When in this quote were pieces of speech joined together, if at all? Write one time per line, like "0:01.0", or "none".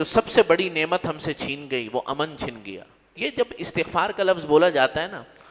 0:03.1